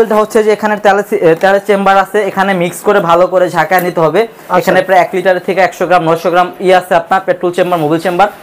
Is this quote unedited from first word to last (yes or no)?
yes